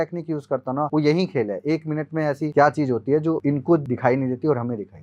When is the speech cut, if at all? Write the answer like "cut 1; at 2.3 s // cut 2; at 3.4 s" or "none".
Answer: cut 1; at 0.9 s // cut 2; at 2.5 s // cut 3; at 3.6 s

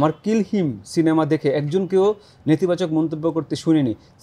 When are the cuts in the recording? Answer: none

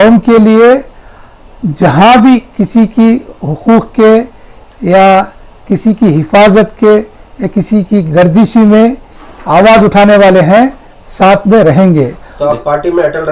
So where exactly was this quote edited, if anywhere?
cut 1; at 12.3 s

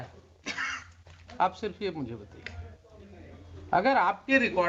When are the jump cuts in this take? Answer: none

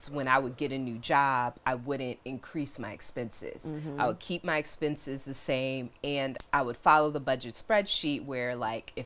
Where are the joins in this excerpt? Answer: cut 1; at 6.4 s

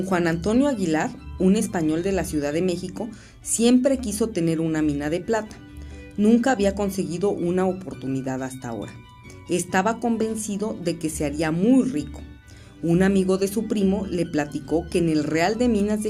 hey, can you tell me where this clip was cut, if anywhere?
cut 1; at 14.0 s

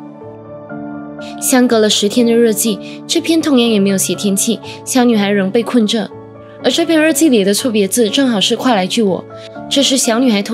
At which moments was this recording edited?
none

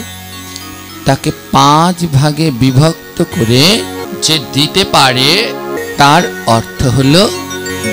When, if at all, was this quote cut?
cut 1; at 4.1 s // cut 2; at 5.8 s

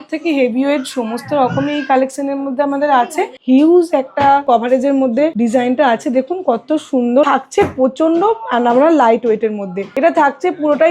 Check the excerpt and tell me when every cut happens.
cut 1; at 3.3 s // cut 2; at 4.4 s // cut 3; at 5.3 s // cut 4; at 7.2 s // cut 5; at 9.8 s

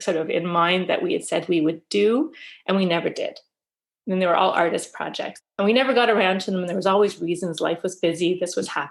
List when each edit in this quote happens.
cut 1; at 5.4 s

